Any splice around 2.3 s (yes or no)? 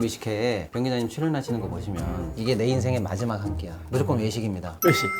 yes